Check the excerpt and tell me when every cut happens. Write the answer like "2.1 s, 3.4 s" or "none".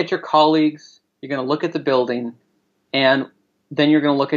none